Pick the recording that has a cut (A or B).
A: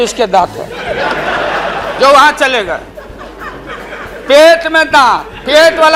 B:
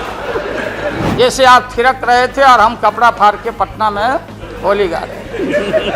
B